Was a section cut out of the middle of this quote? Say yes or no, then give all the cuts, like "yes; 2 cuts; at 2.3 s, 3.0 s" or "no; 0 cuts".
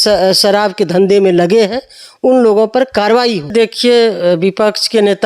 yes; 1 cut; at 3.5 s